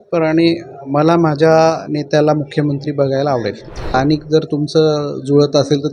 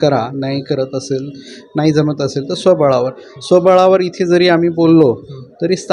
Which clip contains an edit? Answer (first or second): first